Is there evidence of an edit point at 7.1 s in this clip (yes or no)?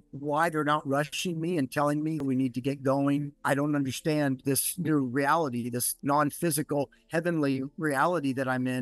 no